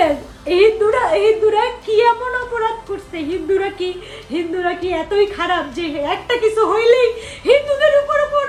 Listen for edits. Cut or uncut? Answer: uncut